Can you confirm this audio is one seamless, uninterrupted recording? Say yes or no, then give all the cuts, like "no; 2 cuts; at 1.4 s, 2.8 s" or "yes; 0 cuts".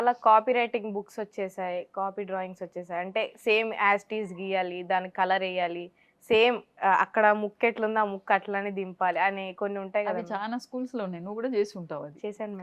yes; 0 cuts